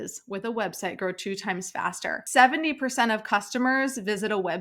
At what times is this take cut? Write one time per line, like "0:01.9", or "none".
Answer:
0:02.2